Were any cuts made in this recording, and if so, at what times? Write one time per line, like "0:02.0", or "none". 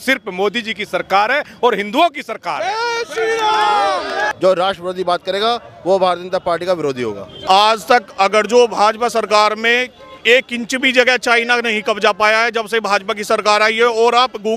0:04.3
0:07.4